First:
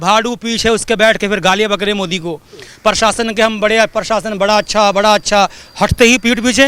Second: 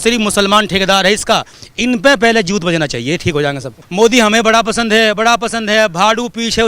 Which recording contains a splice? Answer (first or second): second